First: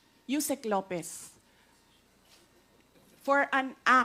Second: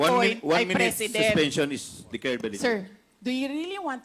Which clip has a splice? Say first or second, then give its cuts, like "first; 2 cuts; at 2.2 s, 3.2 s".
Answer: second; 1 cut; at 2.4 s